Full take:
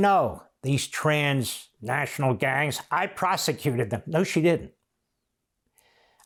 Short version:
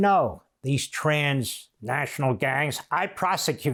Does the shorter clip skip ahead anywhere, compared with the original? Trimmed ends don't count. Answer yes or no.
no